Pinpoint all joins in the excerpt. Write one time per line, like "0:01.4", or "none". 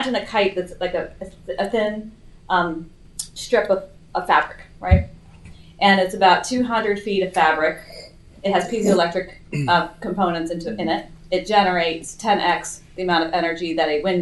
none